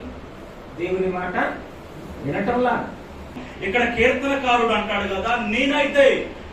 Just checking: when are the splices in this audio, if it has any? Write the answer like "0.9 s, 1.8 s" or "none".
3.5 s

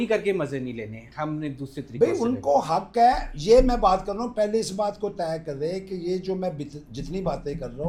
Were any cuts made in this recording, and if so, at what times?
none

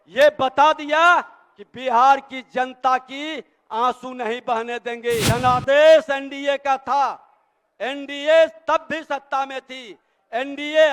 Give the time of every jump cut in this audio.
5.2 s

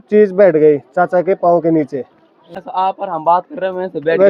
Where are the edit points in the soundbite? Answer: 2.4 s

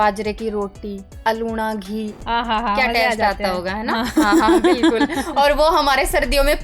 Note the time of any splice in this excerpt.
2.2 s

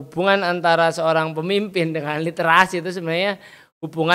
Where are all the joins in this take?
none

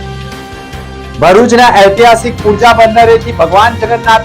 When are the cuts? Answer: 1.1 s

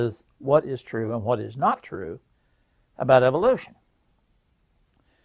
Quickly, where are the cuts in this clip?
3.5 s

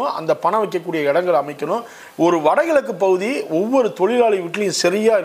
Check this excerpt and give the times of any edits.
2.0 s

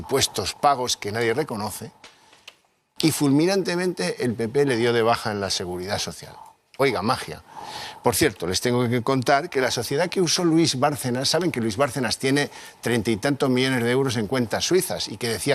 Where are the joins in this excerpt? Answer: none

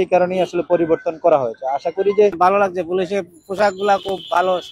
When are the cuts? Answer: 2.3 s

